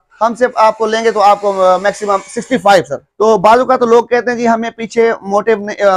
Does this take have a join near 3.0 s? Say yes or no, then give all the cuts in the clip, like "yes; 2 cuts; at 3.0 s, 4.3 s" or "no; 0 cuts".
yes; 1 cut; at 3.0 s